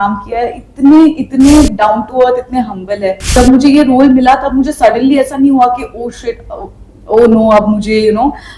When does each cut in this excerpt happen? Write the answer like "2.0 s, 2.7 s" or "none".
3.2 s